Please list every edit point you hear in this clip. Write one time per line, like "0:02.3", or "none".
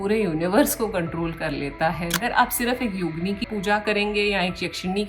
0:02.2
0:03.4